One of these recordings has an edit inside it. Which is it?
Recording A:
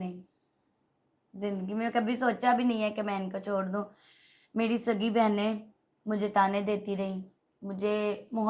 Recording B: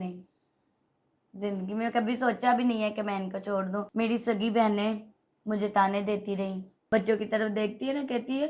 B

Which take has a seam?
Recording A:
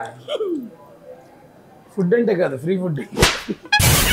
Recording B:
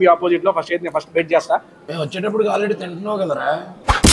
B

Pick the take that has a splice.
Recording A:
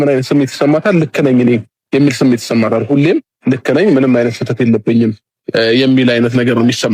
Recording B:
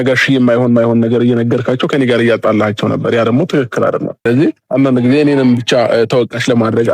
B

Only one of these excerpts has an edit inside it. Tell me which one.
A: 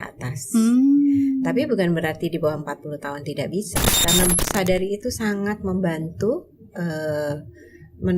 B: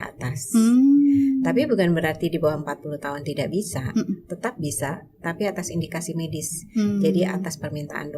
A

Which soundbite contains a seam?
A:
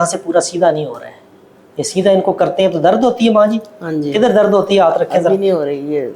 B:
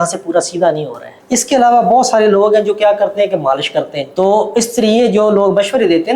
B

